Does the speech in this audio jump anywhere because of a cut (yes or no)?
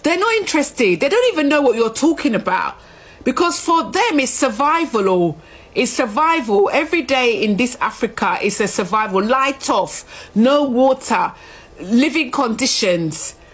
no